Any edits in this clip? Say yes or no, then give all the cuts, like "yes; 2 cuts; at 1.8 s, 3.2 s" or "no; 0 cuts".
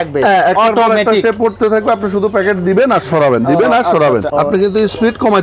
yes; 1 cut; at 4.3 s